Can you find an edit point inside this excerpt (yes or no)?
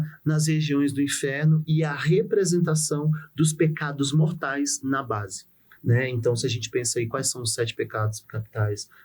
no